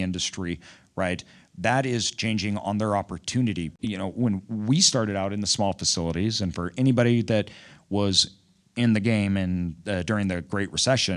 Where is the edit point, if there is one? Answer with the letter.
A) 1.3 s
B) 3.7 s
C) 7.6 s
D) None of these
B